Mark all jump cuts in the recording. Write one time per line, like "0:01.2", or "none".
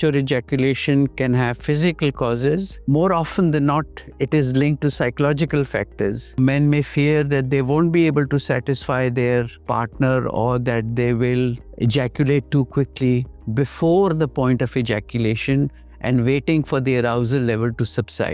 0:02.7
0:06.4
0:09.6
0:11.6
0:13.3